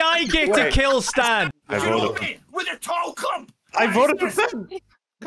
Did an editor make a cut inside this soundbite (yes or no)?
yes